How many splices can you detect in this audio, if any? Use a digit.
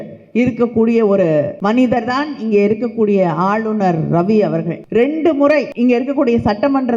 3